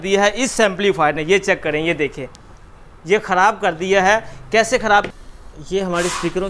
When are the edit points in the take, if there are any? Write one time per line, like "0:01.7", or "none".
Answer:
0:05.1